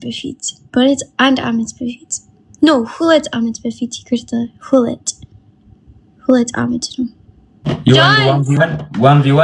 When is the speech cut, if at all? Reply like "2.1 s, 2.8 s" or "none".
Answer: 7.7 s